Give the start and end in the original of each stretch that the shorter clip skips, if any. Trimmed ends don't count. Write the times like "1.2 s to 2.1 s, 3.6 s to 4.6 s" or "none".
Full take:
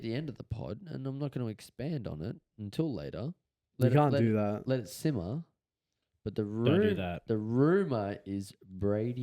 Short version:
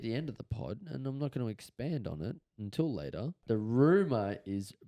3.4 s to 7.2 s